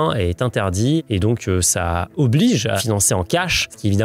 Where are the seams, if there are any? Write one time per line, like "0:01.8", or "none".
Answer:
0:01.0

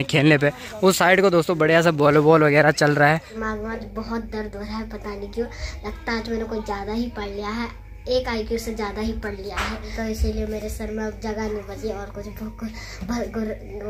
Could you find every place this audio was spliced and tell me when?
0:03.3
0:09.8

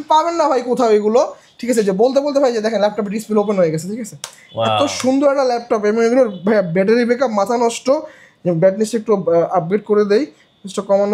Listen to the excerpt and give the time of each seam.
none

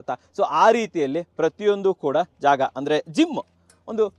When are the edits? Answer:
none

